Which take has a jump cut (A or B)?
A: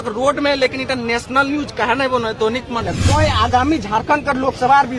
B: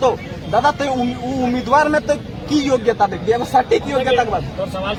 A